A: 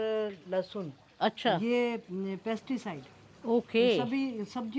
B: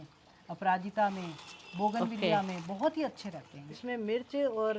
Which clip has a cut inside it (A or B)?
B